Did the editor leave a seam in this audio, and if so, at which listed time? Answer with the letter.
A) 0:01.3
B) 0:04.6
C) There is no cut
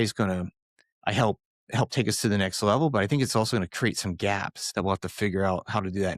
B